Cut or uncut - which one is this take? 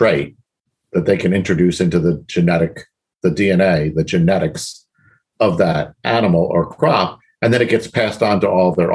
uncut